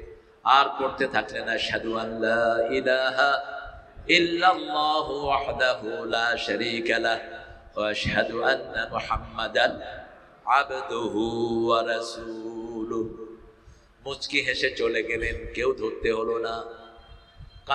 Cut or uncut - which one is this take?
uncut